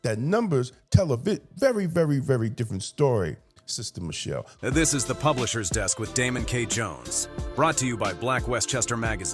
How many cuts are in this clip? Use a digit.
1